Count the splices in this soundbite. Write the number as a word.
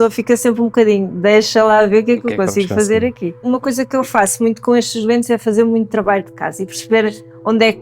one